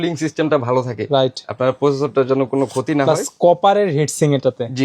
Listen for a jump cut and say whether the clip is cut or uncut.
uncut